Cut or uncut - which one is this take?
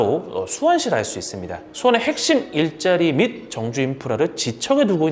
cut